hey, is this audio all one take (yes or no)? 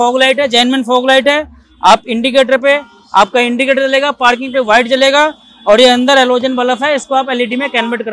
yes